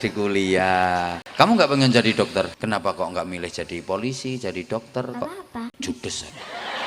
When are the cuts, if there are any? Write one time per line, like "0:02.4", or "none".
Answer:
0:01.2
0:02.5
0:05.9